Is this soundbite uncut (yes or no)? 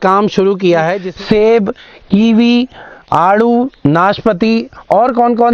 no